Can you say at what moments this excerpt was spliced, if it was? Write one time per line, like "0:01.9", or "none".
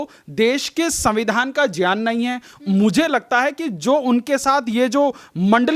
none